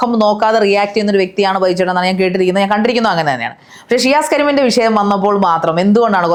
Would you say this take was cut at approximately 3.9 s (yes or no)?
no